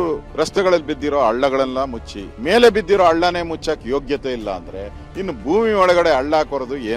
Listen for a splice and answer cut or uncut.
cut